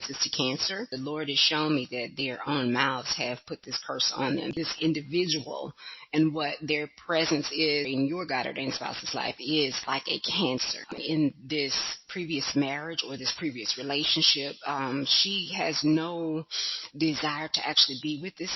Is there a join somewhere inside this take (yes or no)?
yes